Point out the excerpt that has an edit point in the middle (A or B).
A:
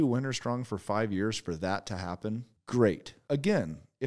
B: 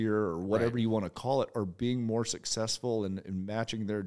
A